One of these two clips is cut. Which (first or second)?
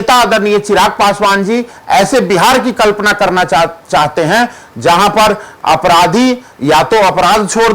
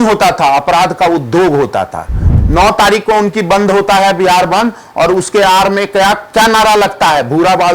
second